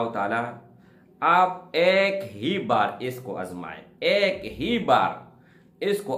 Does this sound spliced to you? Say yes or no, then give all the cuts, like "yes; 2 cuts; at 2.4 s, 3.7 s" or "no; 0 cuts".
no; 0 cuts